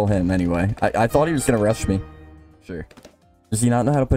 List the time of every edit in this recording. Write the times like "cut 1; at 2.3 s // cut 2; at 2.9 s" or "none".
cut 1; at 2.8 s